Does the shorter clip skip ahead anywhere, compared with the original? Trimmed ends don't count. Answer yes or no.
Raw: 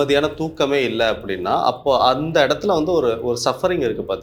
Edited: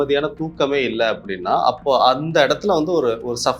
no